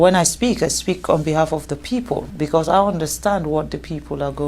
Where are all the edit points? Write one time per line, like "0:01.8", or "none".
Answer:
0:02.3